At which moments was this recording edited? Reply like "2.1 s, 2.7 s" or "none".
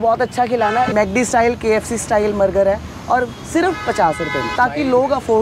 0.9 s, 4.5 s